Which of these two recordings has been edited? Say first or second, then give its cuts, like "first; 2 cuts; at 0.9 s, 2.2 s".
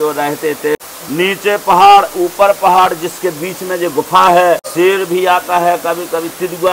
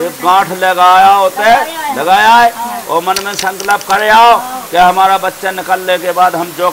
first; 2 cuts; at 0.8 s, 4.7 s